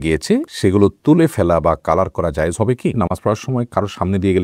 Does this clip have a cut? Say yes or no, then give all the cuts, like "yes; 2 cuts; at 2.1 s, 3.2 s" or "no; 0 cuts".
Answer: yes; 1 cut; at 3.0 s